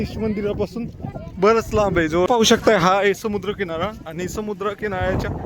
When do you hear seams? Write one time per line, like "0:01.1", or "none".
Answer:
0:02.3